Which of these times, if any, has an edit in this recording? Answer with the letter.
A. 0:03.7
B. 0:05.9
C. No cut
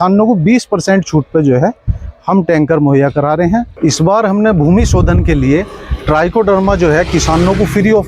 A